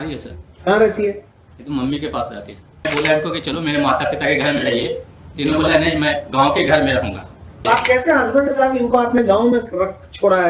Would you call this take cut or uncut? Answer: cut